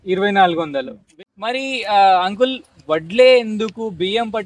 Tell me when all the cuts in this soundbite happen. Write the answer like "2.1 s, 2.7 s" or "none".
1.0 s

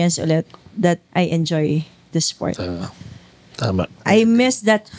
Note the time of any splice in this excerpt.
1.0 s, 4.0 s

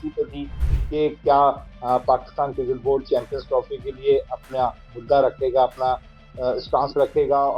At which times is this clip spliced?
none

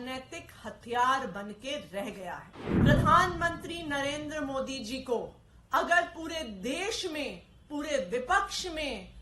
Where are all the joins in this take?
2.7 s

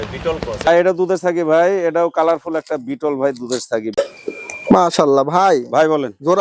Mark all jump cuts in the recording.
0.7 s, 3.9 s

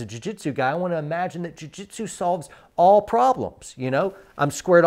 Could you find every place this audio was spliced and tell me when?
none

